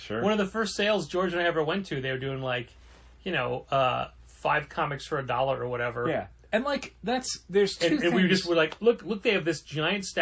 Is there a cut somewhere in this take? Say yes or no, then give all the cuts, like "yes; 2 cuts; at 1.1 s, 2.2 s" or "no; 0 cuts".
no; 0 cuts